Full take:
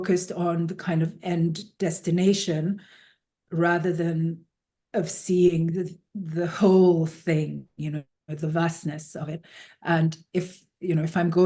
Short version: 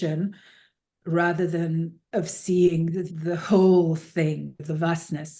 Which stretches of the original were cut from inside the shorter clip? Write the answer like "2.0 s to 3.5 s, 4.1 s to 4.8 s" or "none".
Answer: 4.4 s to 4.8 s, 5.9 s to 6.2 s, 7.6 s to 8.3 s